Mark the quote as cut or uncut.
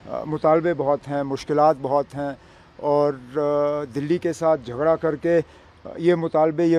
uncut